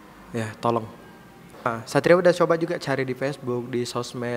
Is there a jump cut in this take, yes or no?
yes